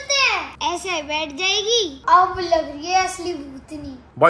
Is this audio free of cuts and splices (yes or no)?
no